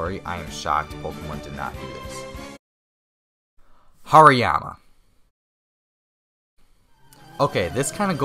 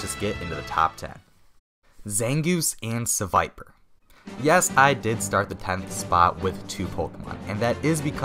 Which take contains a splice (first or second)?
first